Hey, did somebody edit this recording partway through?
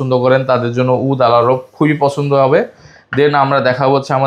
no; 0 cuts

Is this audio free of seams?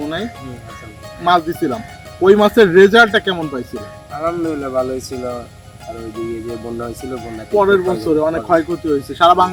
yes; 0 cuts

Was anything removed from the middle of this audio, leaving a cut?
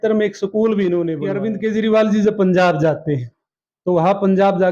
yes; 1 cut; at 1.4 s

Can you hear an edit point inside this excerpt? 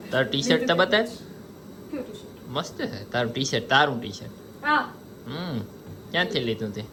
no; 0 cuts

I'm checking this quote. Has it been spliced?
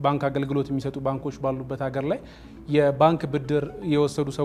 no; 0 cuts

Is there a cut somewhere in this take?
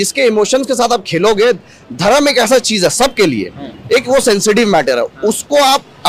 no; 0 cuts

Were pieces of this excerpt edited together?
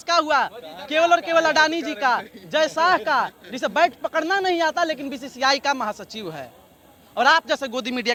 no; 0 cuts

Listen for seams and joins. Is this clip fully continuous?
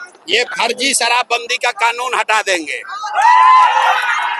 yes; 0 cuts

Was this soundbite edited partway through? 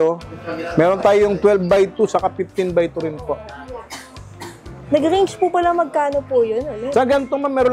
no; 0 cuts

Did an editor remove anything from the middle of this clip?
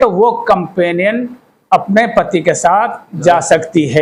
no; 0 cuts

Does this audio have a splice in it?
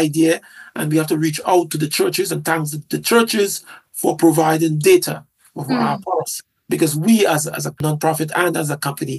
no; 0 cuts

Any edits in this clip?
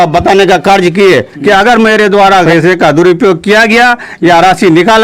yes; 2 cuts; at 1.3 s, 2.5 s

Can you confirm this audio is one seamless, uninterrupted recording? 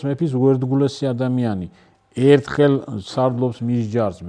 yes; 0 cuts

